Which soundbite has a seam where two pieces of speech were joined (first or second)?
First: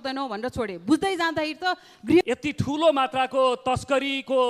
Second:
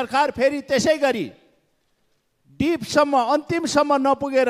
first